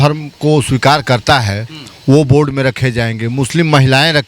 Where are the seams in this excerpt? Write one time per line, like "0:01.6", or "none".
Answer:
none